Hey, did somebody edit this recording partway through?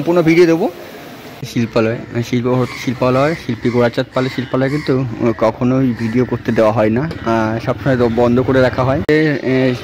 yes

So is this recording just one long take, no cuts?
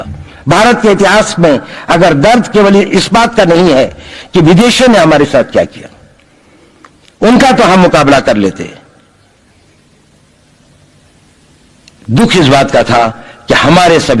yes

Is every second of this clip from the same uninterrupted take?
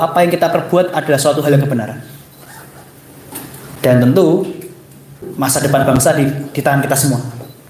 yes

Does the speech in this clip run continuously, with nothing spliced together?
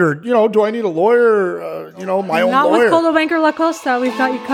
yes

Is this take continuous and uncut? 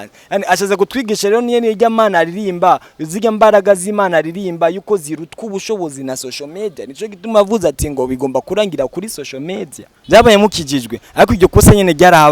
no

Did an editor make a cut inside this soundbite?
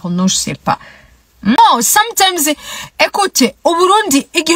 yes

